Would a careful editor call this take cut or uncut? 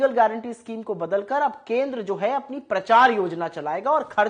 uncut